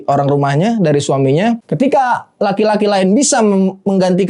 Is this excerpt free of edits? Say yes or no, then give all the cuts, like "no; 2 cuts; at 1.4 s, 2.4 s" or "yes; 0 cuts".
no; 1 cut; at 1.7 s